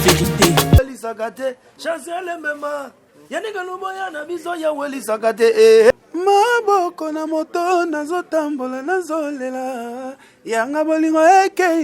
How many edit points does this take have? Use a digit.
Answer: 2